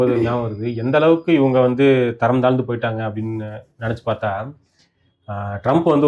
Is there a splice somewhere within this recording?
no; 0 cuts

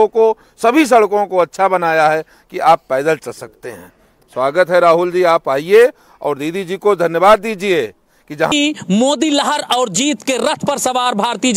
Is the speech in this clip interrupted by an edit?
yes; 1 cut; at 8.5 s

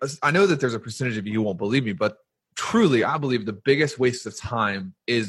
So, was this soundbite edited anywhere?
yes; 1 cut; at 2.3 s

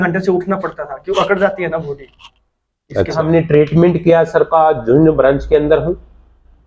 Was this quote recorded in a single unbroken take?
no; 1 cut; at 3.2 s

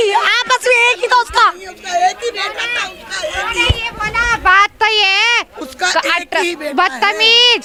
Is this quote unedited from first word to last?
yes; 0 cuts

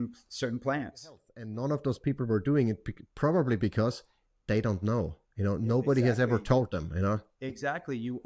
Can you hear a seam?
yes; 1 cut; at 1.4 s

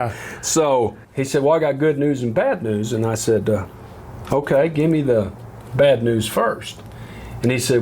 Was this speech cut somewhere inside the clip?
yes; 1 cut; at 1.0 s

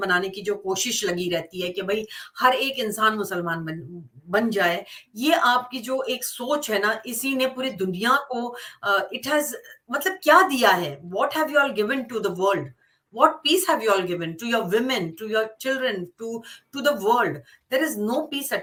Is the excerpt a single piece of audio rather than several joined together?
yes; 0 cuts

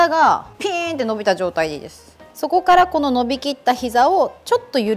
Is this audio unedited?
no; 1 cut; at 2.3 s

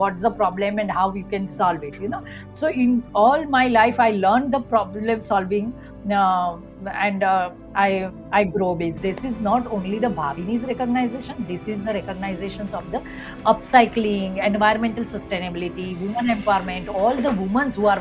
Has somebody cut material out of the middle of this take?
yes; 1 cut; at 9.0 s

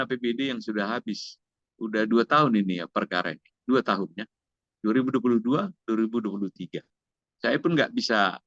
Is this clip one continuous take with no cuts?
yes; 0 cuts

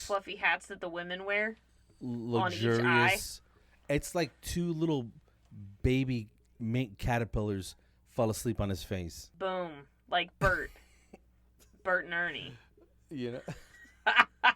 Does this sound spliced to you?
yes; 1 cut; at 9.2 s

